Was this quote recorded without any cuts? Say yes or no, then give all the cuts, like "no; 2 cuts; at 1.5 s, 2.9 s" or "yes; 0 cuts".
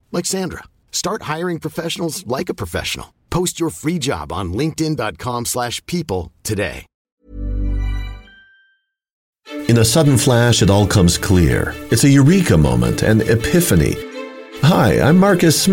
no; 1 cut; at 9.3 s